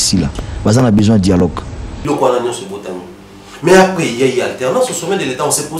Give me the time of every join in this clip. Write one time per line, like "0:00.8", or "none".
0:02.0